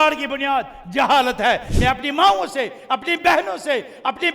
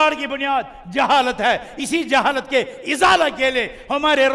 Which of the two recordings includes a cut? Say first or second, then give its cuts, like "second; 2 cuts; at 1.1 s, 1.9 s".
first; 1 cut; at 1.7 s